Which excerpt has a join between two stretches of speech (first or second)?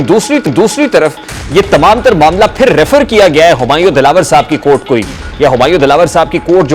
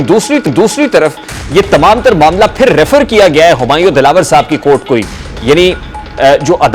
first